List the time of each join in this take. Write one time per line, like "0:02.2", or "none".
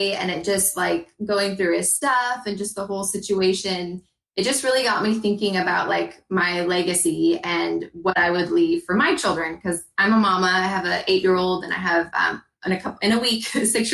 none